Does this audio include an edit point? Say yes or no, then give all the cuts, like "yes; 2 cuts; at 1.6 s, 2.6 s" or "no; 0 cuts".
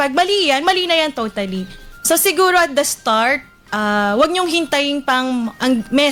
no; 0 cuts